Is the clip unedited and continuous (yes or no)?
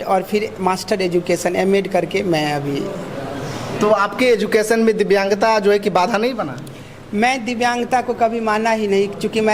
yes